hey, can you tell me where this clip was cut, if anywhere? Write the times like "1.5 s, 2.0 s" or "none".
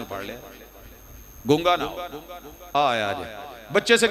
2.7 s